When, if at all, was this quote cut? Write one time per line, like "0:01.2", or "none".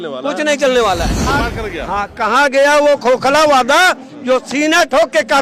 0:01.3